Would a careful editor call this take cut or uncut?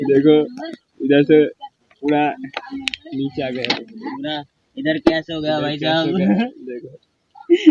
uncut